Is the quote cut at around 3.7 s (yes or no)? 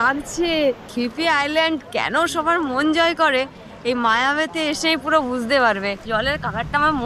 no